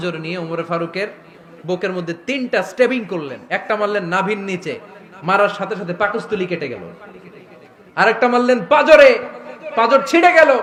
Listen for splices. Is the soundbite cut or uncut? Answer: uncut